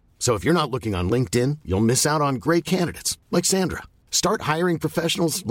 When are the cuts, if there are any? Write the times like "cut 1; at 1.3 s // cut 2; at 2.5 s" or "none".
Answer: none